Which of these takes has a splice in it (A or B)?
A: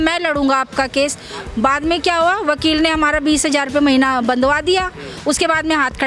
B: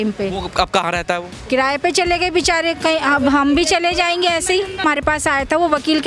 B